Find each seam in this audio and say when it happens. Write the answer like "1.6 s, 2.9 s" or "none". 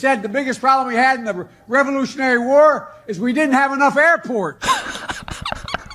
none